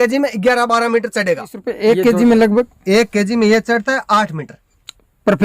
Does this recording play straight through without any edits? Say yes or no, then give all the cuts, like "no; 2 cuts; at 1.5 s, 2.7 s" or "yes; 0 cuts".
no; 1 cut; at 1.7 s